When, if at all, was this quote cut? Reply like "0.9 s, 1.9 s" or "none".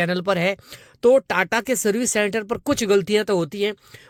none